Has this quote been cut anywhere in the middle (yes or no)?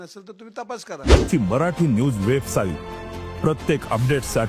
yes